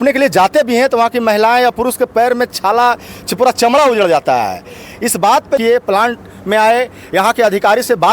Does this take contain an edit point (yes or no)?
yes